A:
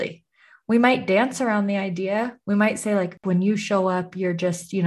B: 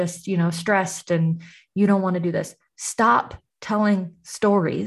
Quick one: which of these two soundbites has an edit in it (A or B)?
A